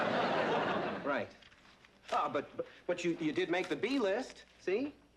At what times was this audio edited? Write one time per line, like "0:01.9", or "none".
0:03.2